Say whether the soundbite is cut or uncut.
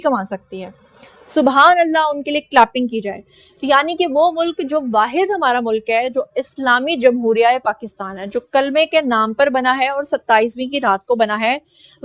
uncut